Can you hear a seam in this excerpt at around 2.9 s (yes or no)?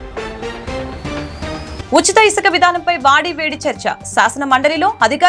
no